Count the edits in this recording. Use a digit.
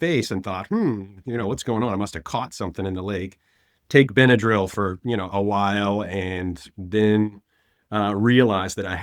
0